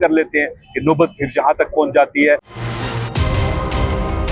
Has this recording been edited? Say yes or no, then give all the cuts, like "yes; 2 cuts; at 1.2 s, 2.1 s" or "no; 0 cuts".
yes; 1 cut; at 2.5 s